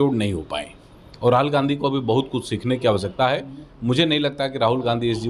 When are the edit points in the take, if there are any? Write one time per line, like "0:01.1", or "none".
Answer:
none